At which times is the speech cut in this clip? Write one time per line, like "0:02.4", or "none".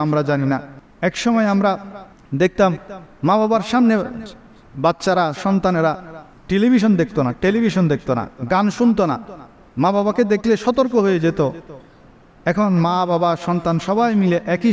none